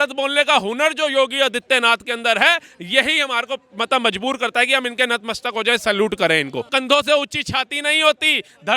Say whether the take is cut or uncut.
cut